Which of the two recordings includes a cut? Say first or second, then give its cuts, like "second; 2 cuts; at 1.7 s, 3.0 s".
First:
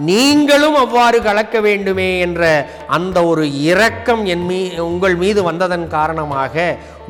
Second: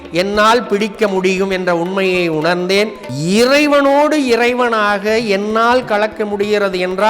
second; 1 cut; at 3.0 s